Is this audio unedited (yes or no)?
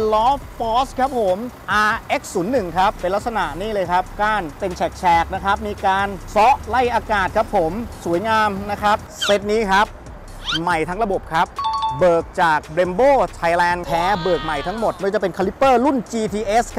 no